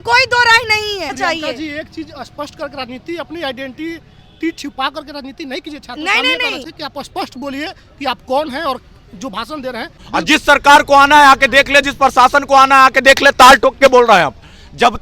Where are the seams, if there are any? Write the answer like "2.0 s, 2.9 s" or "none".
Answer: 1.2 s, 6.7 s, 10.0 s